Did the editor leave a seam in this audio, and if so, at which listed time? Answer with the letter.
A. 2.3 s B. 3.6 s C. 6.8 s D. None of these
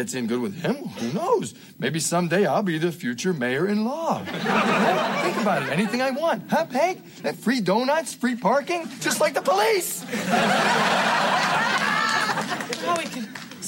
D